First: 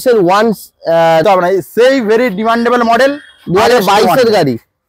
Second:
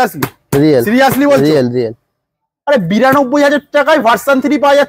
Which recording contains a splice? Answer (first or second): first